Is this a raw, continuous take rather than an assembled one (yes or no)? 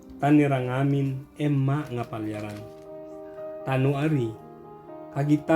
yes